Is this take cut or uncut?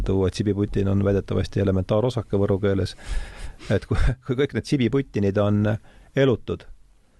uncut